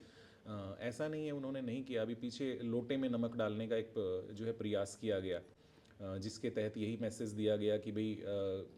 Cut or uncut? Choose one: uncut